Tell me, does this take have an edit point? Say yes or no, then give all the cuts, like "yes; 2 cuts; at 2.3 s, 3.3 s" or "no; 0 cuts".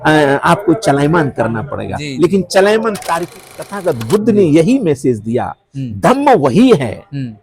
yes; 1 cut; at 3.7 s